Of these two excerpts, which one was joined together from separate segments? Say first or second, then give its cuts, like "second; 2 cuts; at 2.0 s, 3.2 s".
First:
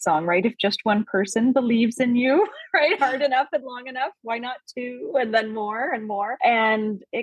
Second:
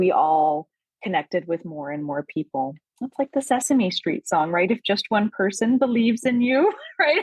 first; 1 cut; at 6.3 s